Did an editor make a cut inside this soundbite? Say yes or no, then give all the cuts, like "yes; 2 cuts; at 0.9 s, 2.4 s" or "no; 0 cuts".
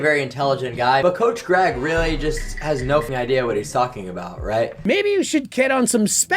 yes; 2 cuts; at 3.0 s, 4.8 s